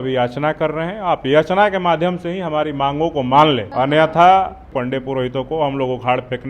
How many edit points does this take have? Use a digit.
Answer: 2